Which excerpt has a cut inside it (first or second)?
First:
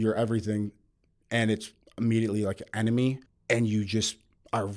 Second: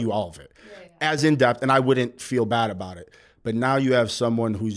first